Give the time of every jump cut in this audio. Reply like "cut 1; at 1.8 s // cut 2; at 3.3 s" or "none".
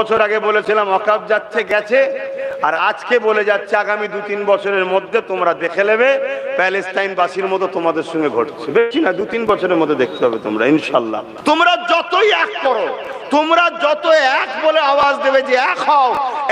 cut 1; at 11.3 s